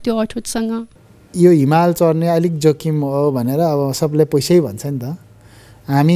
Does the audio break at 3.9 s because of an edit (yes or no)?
no